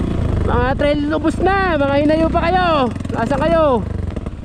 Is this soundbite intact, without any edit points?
yes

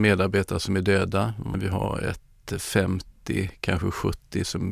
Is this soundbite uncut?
yes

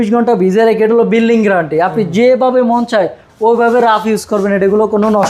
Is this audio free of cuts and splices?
yes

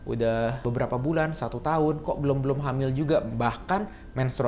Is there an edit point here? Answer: no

